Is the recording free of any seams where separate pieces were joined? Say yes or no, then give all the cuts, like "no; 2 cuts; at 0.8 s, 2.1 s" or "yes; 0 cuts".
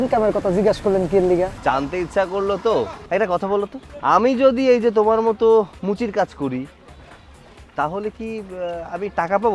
no; 3 cuts; at 1.5 s, 3.0 s, 3.8 s